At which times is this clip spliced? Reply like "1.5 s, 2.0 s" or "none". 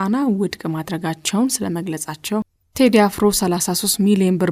2.6 s